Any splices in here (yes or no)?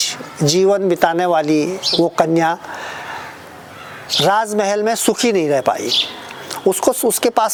no